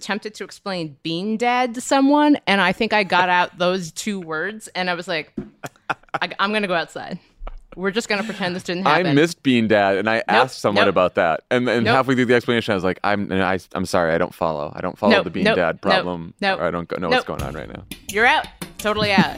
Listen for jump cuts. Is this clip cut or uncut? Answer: uncut